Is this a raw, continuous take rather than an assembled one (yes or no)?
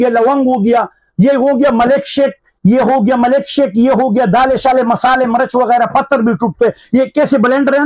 yes